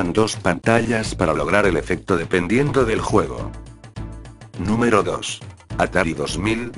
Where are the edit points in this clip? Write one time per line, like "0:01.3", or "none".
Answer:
0:01.1